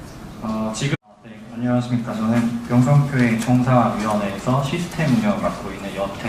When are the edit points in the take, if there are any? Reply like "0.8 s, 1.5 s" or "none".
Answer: none